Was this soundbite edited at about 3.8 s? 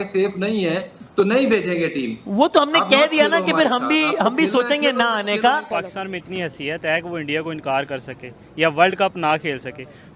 no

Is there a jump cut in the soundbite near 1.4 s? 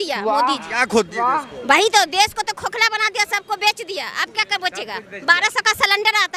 no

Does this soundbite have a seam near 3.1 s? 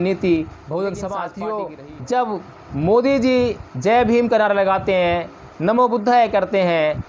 no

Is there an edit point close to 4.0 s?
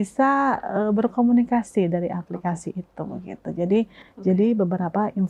yes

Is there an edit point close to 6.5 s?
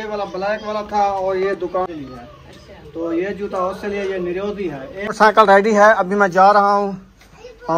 no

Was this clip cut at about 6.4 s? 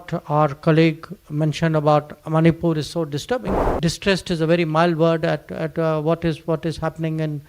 no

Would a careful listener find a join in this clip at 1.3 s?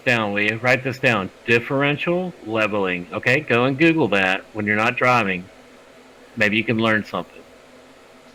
no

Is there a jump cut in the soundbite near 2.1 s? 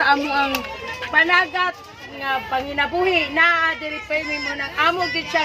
no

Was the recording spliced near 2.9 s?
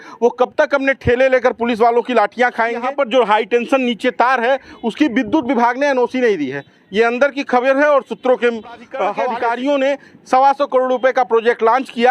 yes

